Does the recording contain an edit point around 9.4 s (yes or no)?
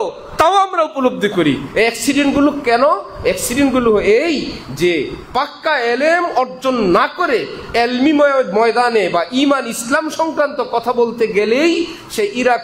no